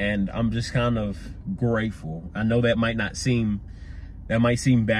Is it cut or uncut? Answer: uncut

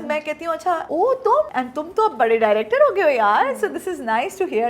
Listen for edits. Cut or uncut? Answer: cut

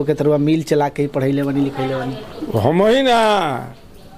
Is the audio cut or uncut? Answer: uncut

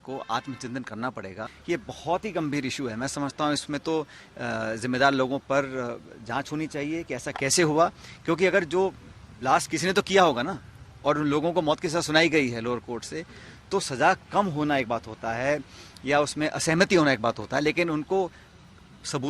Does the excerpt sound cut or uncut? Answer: cut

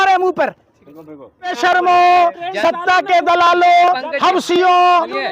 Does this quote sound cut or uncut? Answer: cut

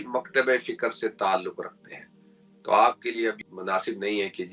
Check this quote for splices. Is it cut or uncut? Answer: uncut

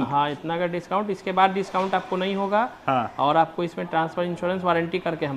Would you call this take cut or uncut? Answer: uncut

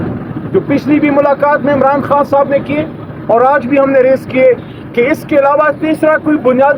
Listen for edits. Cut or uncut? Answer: uncut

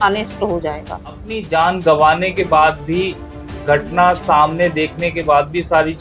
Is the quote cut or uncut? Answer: cut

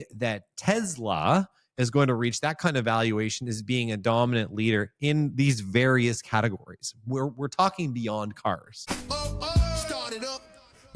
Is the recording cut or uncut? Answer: cut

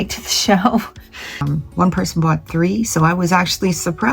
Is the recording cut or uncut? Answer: cut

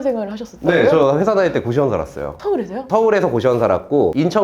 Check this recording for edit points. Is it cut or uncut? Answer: uncut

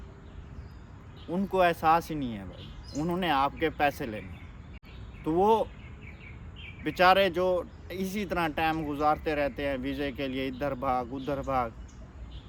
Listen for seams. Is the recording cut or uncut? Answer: uncut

